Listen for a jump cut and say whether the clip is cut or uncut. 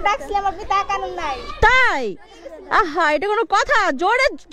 uncut